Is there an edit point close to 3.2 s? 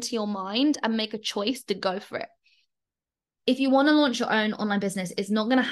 yes; 1 cut; at 3.2 s

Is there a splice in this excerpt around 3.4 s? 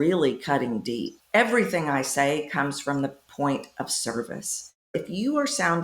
no; 2 cuts; at 1.1 s, 4.9 s

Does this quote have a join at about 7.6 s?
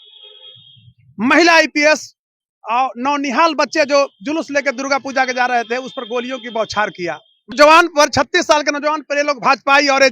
yes; 1 cut; at 7.6 s

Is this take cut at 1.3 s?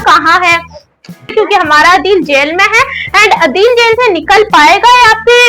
yes; 1 cut; at 1.3 s

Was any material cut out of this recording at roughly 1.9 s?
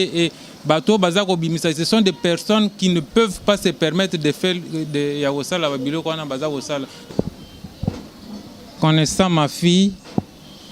no; 1 cut; at 7.1 s

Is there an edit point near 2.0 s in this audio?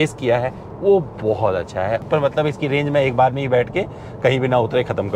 yes; 1 cut; at 2.0 s

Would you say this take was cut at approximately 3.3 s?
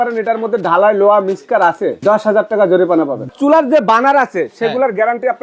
yes; 1 cut; at 3.3 s

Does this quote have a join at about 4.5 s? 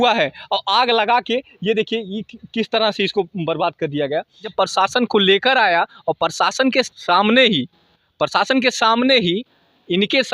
yes; 2 cuts; at 4.5 s, 7.0 s

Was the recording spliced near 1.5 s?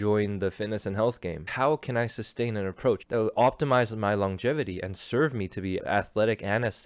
yes; 3 cuts; at 1.5 s, 3.0 s, 5.8 s

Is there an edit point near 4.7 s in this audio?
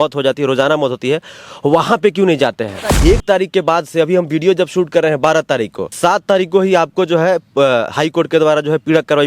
no; 2 cuts; at 3.0 s, 5.9 s

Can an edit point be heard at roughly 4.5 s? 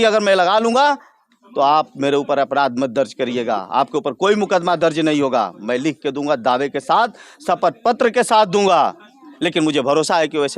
no; 0 cuts

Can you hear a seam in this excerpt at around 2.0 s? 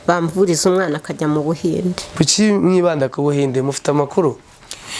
yes; 1 cut; at 2.0 s

